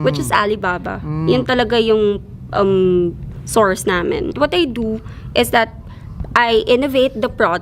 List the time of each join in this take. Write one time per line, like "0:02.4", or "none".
0:04.3